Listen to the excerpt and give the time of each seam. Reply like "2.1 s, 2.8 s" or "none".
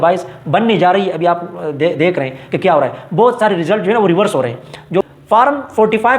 5.0 s